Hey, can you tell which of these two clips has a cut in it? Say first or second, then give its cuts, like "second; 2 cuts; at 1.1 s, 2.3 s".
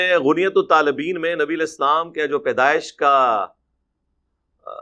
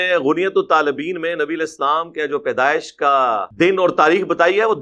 second; 1 cut; at 3.5 s